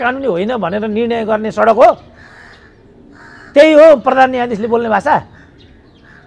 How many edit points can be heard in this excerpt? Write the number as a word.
zero